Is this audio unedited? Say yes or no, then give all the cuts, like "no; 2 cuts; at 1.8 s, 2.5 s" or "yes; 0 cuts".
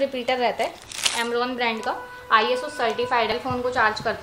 no; 1 cut; at 3.3 s